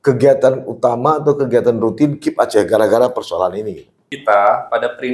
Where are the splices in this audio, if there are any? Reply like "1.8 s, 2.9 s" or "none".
4.1 s